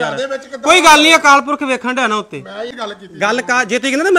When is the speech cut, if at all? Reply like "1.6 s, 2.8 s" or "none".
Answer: 2.7 s